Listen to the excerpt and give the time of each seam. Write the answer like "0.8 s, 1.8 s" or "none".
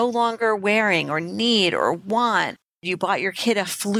2.6 s